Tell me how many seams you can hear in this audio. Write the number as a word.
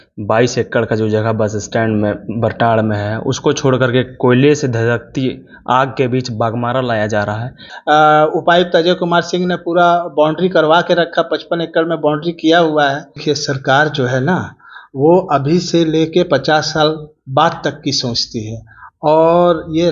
two